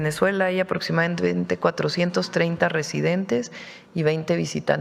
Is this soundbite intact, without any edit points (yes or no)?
yes